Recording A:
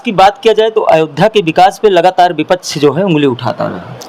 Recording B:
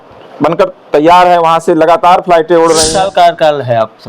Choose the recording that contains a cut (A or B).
B